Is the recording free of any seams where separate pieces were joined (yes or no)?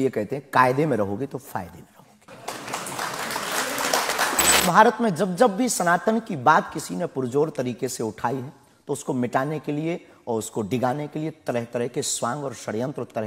no